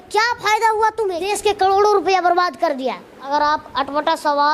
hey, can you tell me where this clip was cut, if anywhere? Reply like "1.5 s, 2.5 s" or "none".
1.3 s, 3.1 s